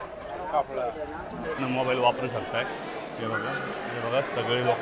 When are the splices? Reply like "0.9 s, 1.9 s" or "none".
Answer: 1.6 s